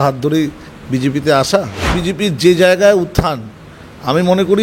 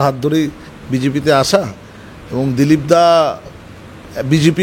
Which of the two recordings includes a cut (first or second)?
first